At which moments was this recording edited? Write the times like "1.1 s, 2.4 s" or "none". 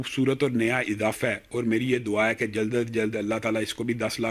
none